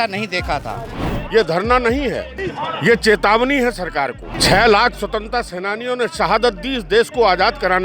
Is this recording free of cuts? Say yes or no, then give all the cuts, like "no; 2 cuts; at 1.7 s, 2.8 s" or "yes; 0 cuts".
no; 3 cuts; at 0.9 s, 2.3 s, 4.3 s